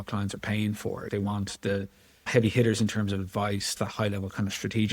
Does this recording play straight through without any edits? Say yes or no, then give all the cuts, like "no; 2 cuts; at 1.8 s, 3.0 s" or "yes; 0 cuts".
no; 1 cut; at 3.7 s